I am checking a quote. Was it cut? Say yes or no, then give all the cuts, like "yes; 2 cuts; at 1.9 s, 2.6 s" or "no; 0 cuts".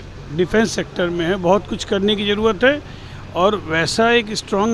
no; 0 cuts